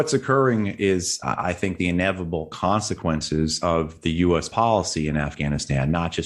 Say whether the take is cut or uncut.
uncut